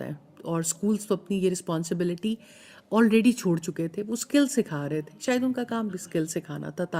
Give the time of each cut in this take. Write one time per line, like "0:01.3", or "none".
none